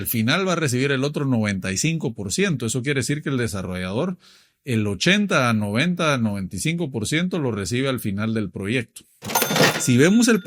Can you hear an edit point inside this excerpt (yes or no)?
yes